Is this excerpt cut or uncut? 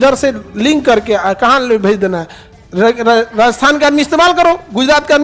uncut